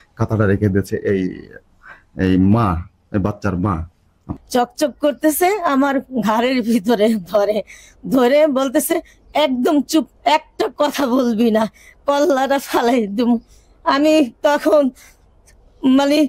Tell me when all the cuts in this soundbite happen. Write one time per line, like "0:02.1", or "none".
0:04.2